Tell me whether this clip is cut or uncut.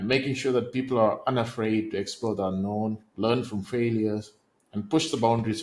uncut